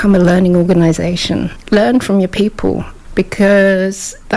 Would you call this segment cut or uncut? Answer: cut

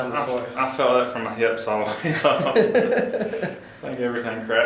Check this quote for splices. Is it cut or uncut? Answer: uncut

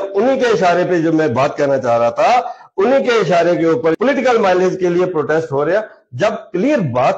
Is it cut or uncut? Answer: cut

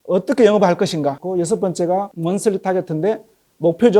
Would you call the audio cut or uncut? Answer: cut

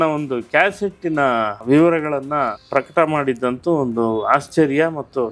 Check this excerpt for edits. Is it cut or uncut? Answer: cut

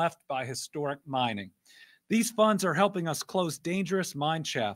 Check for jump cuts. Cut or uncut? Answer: uncut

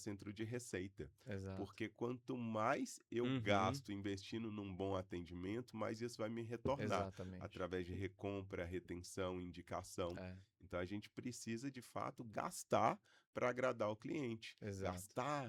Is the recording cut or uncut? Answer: uncut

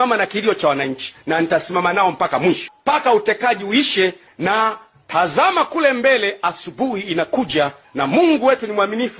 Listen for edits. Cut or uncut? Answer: cut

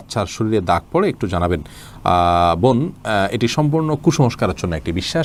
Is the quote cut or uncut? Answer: uncut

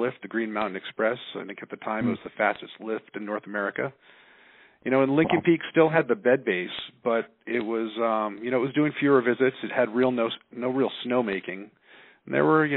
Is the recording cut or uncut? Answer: uncut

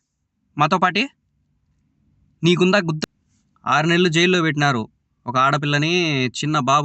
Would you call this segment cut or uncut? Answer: cut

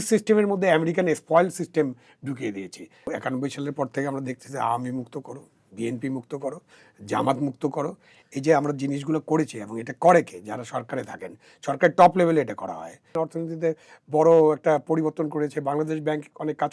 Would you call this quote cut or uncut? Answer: cut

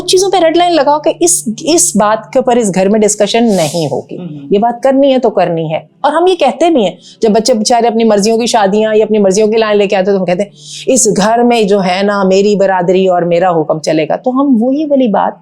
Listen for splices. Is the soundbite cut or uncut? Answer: uncut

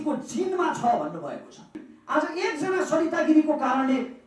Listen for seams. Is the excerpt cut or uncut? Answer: cut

